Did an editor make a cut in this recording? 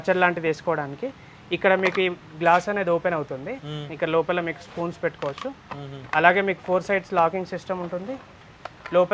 no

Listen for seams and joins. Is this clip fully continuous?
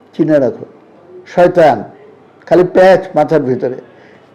yes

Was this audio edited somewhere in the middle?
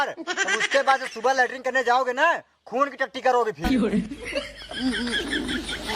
yes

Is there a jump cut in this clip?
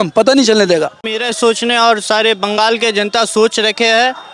yes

